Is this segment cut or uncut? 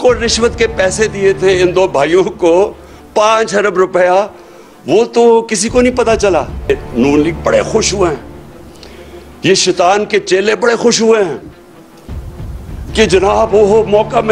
cut